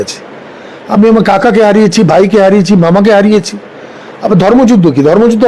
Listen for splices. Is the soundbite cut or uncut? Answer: uncut